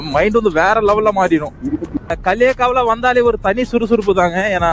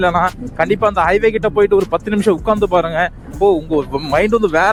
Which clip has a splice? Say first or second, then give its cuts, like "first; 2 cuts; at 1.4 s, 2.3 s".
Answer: first; 1 cut; at 1.8 s